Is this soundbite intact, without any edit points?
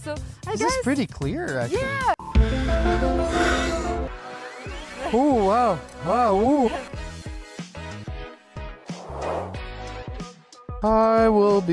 no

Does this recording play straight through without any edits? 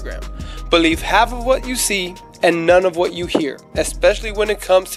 yes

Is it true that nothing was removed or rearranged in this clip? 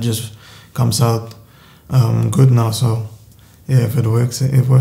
yes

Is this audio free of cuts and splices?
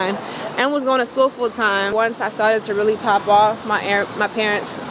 no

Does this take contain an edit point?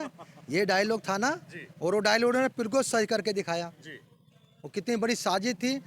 no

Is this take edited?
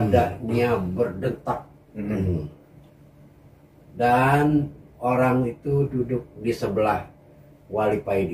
no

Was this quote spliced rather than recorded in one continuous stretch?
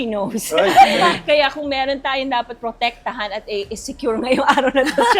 no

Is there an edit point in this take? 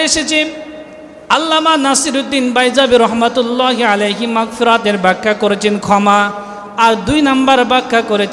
no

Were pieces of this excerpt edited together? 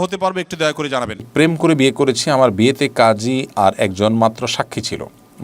yes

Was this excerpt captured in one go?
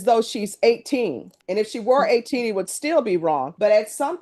yes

